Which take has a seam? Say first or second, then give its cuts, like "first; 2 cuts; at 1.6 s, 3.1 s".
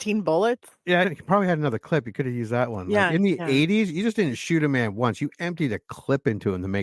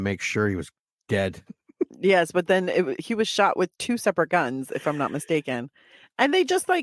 first; 1 cut; at 1.1 s